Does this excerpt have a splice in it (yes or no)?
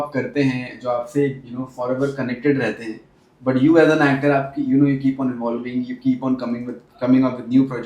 no